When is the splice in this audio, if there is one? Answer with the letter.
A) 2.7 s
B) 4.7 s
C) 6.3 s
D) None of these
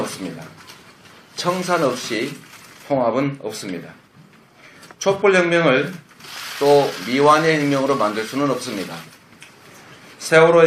D